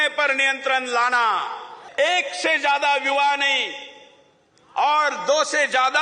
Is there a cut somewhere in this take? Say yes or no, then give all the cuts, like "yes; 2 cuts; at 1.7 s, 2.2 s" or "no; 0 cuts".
yes; 1 cut; at 1.8 s